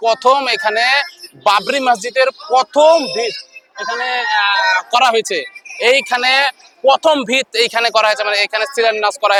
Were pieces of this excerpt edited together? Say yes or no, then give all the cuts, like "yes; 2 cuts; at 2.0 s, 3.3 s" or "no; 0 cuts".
no; 0 cuts